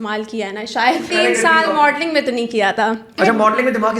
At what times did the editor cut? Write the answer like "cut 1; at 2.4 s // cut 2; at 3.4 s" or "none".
cut 1; at 1.1 s // cut 2; at 3.1 s